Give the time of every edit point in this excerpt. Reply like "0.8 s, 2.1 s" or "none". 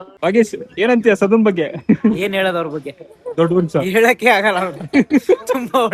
none